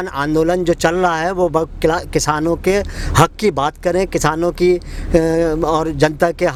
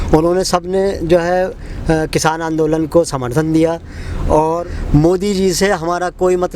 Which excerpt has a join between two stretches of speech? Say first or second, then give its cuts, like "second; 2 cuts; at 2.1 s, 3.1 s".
second; 1 cut; at 4.7 s